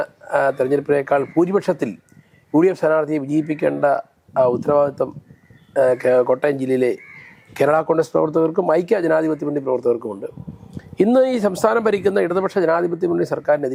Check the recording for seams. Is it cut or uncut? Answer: uncut